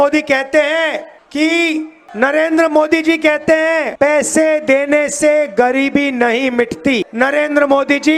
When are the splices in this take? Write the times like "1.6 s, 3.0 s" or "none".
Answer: 1.2 s, 2.0 s, 3.9 s, 7.1 s